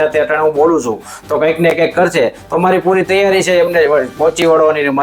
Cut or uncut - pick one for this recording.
uncut